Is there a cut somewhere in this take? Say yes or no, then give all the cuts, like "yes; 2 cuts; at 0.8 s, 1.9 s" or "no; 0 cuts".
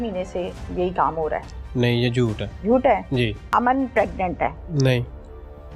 yes; 3 cuts; at 2.5 s, 3.4 s, 4.6 s